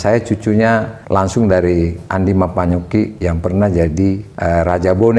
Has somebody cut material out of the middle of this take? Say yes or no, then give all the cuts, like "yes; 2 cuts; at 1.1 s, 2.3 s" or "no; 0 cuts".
yes; 3 cuts; at 1.0 s, 3.2 s, 4.3 s